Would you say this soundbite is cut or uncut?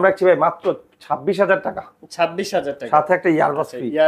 uncut